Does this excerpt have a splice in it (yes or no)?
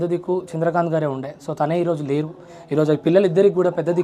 no